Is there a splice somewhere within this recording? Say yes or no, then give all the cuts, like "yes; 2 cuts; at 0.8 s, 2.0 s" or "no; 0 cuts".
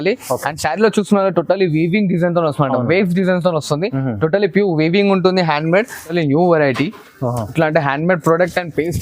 yes; 1 cut; at 6.1 s